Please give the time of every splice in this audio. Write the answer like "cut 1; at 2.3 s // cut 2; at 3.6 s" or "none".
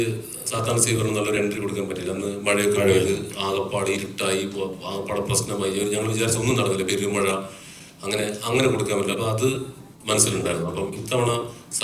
none